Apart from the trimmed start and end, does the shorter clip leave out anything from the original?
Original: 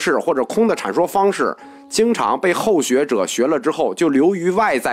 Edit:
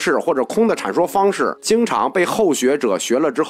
yes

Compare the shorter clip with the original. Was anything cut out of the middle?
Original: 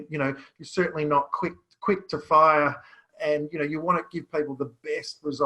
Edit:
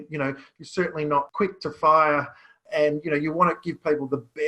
yes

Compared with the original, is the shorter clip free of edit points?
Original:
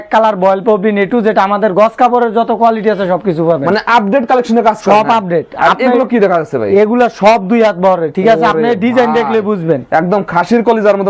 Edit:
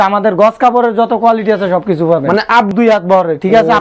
no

